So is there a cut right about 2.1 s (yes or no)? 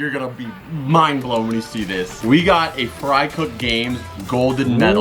yes